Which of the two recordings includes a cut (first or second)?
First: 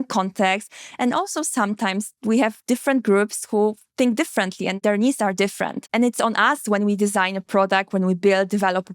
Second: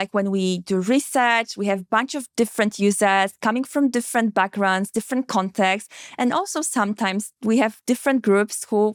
first